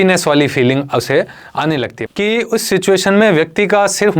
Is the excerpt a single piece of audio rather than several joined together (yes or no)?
no